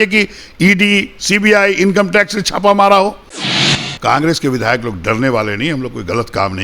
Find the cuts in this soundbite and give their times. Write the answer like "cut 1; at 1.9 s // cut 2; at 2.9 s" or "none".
cut 1; at 3.5 s